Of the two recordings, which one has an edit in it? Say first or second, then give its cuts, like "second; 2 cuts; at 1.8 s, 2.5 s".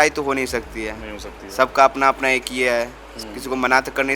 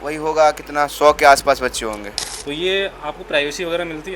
second; 1 cut; at 2.1 s